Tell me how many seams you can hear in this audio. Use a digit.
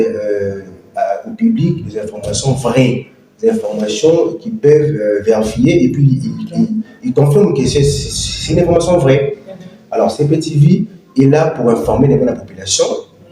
0